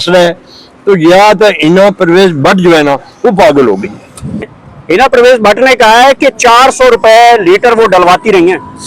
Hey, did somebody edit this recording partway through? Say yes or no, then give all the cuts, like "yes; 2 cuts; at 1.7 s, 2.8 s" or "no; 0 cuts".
yes; 1 cut; at 4.5 s